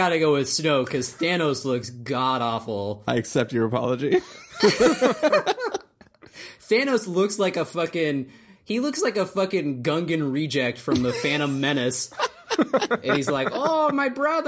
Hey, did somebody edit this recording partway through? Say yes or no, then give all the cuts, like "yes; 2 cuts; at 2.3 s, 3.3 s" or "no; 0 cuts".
yes; 1 cut; at 13.0 s